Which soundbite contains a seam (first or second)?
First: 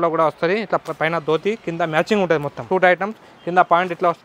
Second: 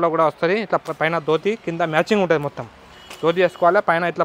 first